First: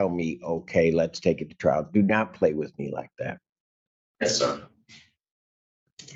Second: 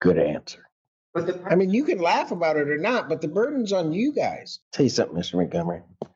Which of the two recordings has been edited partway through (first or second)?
second